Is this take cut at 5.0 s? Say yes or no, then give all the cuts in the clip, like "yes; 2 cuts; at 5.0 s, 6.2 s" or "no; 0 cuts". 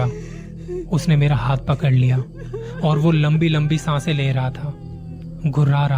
yes; 1 cut; at 5.0 s